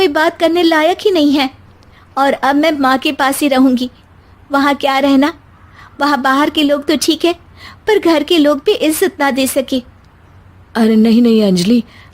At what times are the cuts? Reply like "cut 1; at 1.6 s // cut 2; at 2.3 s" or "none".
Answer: none